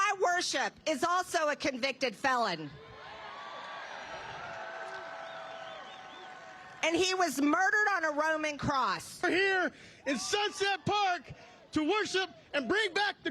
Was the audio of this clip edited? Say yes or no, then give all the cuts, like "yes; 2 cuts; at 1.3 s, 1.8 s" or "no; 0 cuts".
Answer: no; 0 cuts